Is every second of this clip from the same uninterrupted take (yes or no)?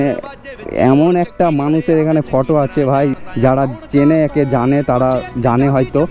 no